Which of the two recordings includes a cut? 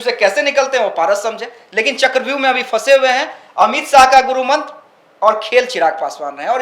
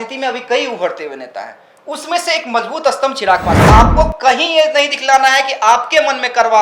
second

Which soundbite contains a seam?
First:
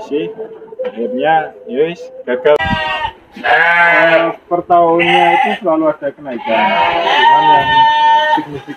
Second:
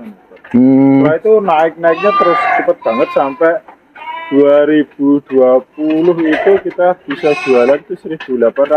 first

